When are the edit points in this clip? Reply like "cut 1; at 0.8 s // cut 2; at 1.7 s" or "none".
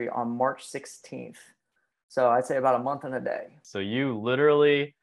cut 1; at 3.7 s